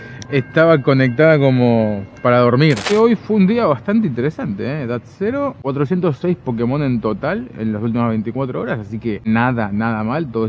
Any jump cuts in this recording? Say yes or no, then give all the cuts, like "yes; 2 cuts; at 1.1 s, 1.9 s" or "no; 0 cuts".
yes; 1 cut; at 2.9 s